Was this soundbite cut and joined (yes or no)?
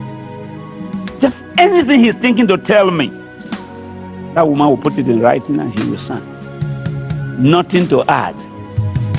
yes